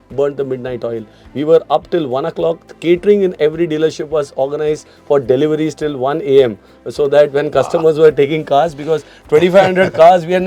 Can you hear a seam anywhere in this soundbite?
no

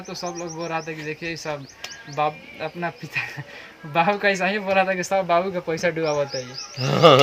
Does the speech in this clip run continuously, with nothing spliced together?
yes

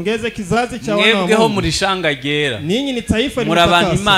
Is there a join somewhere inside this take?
no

